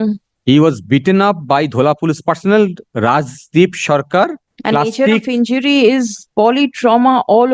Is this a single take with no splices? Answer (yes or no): no